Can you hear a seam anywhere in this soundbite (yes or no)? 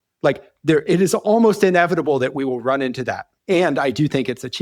yes